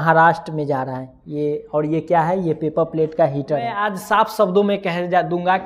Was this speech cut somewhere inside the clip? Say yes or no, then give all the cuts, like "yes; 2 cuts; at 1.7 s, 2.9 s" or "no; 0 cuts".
yes; 1 cut; at 3.8 s